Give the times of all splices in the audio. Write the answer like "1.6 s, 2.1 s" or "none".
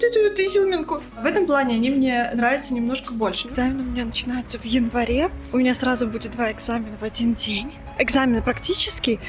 1.2 s, 3.4 s, 5.4 s, 7.8 s